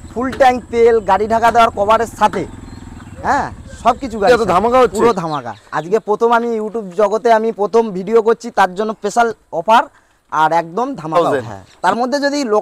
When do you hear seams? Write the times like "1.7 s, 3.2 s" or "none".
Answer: 4.3 s, 11.2 s